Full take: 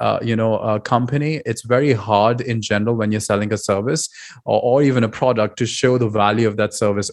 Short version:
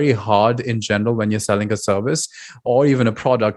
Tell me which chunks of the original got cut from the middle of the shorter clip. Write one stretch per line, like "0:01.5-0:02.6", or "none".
0:04.5-0:04.6